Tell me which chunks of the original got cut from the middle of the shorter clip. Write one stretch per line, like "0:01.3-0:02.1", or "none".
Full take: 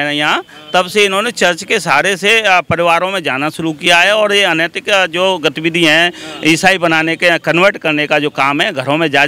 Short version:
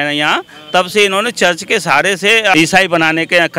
0:02.5-0:06.4